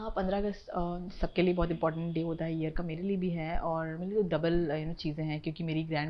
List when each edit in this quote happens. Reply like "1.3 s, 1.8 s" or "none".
none